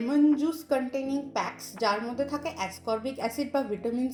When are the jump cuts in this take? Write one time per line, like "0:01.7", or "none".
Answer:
none